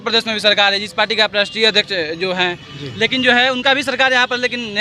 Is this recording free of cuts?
yes; 0 cuts

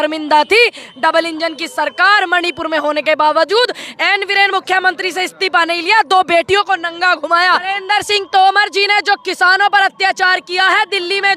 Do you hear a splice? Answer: yes; 1 cut; at 7.6 s

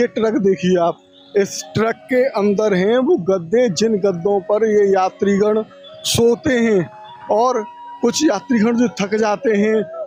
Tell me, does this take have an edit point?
no; 0 cuts

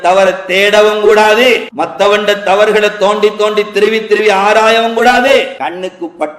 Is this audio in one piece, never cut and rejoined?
no; 2 cuts; at 1.7 s, 5.3 s

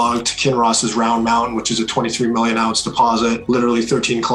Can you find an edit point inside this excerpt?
yes; 1 cut; at 3.4 s

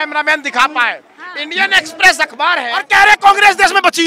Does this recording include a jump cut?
yes; 1 cut; at 2.8 s

